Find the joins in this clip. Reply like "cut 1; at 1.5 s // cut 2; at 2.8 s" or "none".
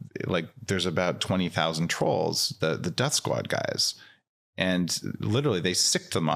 none

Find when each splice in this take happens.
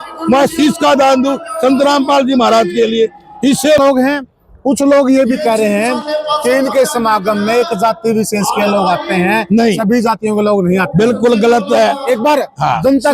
cut 1; at 3.8 s

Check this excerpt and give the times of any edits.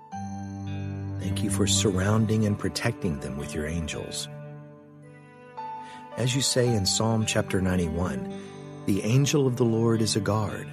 none

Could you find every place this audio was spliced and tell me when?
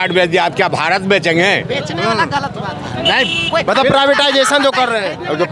none

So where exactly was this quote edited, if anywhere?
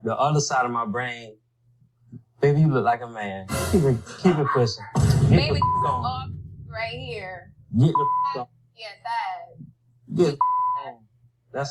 cut 1; at 10.5 s

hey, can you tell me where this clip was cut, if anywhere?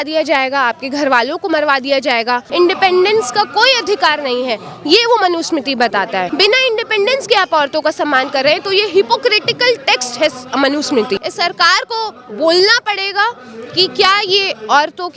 cut 1; at 2.5 s // cut 2; at 6.3 s // cut 3; at 11.2 s

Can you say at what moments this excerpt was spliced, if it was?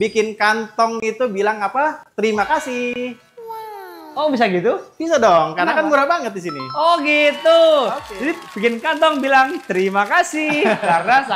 none

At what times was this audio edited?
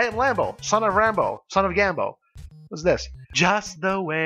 cut 1; at 3.2 s

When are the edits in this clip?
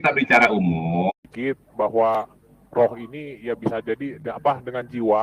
cut 1; at 1.1 s

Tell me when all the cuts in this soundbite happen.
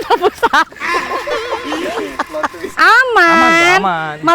cut 1; at 2.7 s

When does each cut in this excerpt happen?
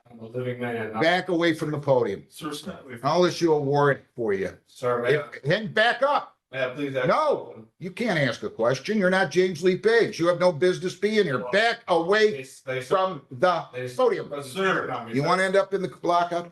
none

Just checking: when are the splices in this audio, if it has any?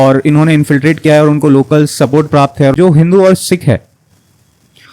cut 1; at 2.7 s

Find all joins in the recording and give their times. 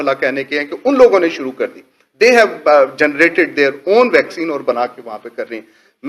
none

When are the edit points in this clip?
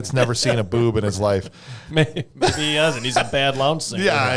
none

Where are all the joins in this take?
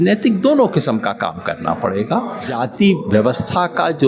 cut 1; at 2.4 s

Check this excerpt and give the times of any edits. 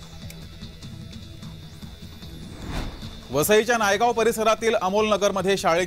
cut 1; at 0.7 s // cut 2; at 2.2 s

